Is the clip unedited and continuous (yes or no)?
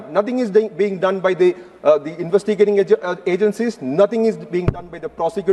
yes